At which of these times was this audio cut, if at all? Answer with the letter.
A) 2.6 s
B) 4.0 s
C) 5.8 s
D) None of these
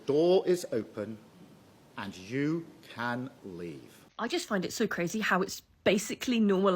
B